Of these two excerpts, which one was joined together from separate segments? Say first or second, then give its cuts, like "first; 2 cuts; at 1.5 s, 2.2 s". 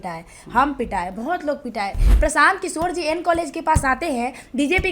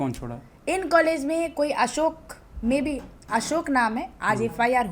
first; 1 cut; at 2.1 s